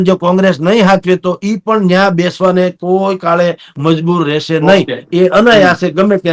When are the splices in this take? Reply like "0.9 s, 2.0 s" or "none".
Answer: none